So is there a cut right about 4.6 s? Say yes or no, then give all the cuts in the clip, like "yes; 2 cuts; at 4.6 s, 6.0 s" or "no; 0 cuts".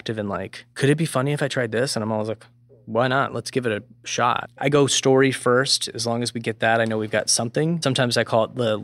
yes; 2 cuts; at 4.6 s, 7.8 s